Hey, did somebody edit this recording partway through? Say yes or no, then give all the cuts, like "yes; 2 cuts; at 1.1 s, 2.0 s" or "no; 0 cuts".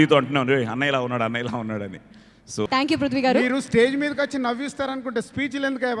yes; 1 cut; at 2.7 s